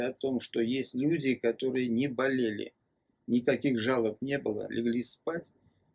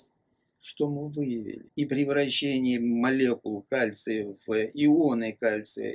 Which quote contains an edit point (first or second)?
second